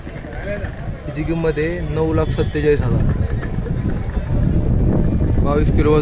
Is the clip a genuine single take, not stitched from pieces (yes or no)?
yes